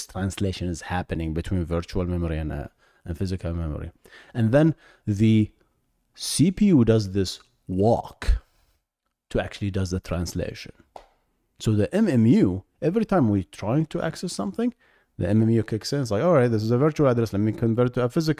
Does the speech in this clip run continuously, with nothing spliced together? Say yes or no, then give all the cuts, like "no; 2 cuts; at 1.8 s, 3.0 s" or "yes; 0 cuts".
yes; 0 cuts